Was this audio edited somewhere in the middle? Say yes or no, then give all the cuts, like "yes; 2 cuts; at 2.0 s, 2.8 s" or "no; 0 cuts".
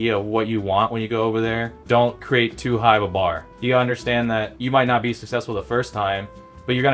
yes; 3 cuts; at 2.1 s, 3.5 s, 4.6 s